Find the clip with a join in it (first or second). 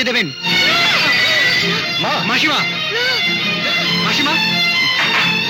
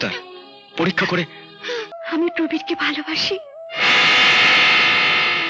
second